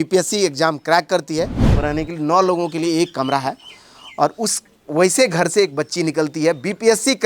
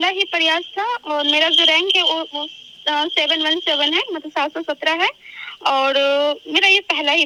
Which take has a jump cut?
first; 1 cut; at 1.6 s

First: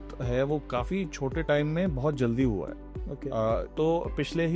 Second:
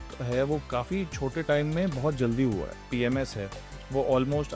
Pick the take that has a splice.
second; 1 cut; at 2.9 s

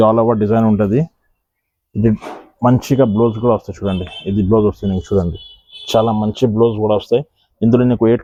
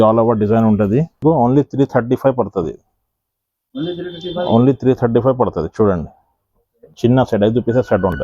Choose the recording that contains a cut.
second; 1 cut; at 1.2 s

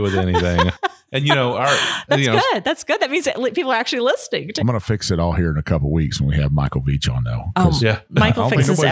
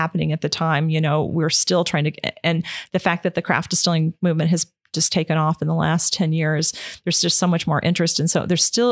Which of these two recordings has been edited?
first; 1 cut; at 4.5 s

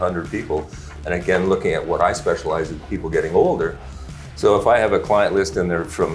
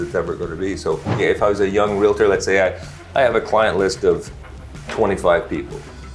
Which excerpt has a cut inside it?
second; 1 cut; at 1.2 s

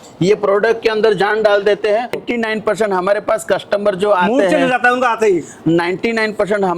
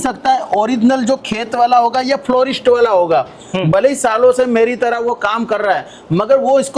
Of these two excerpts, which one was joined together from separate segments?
first; 1 cut; at 2.2 s

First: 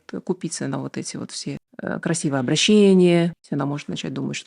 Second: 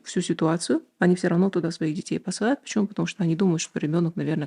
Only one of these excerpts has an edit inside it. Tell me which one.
first; 2 cuts; at 1.7 s, 3.4 s

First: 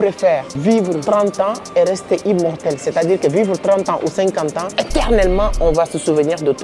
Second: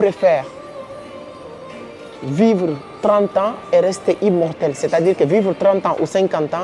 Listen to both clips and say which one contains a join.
first; 2 cuts; at 0.9 s, 4.6 s

